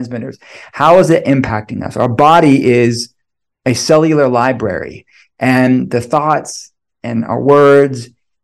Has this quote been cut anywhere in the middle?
no; 0 cuts

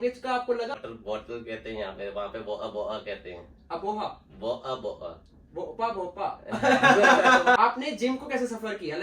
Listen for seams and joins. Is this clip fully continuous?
no; 2 cuts; at 0.7 s, 7.6 s

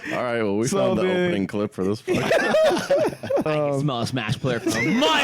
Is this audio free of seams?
no; 1 cut; at 3.5 s

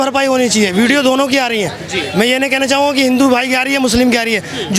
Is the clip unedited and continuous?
yes; 0 cuts

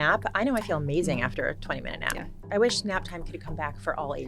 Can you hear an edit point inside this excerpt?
yes; 1 cut; at 2.3 s

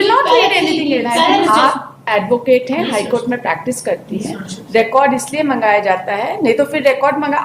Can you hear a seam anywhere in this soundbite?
yes; 1 cut; at 1.4 s

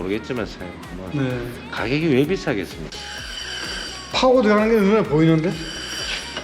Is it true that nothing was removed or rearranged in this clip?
no; 1 cut; at 2.8 s

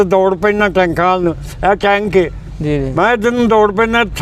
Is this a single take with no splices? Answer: yes; 0 cuts

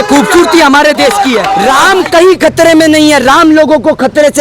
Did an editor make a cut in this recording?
yes; 1 cut; at 1.6 s

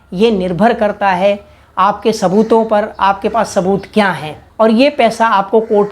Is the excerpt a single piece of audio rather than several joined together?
no; 1 cut; at 4.4 s

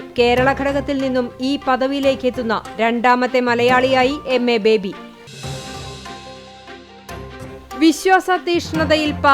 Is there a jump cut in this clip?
yes; 2 cuts; at 5.1 s, 7.5 s

